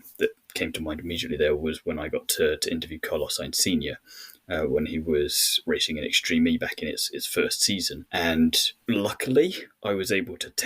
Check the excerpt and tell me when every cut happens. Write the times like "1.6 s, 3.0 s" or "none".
5.6 s, 8.0 s, 8.7 s